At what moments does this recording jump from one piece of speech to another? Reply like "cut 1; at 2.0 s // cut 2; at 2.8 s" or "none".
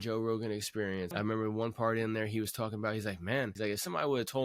cut 1; at 1.1 s // cut 2; at 3.5 s